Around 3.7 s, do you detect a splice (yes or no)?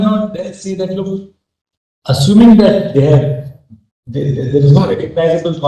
no